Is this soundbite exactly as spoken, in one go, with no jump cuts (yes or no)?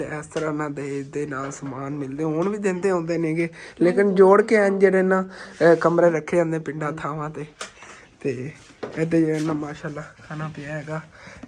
yes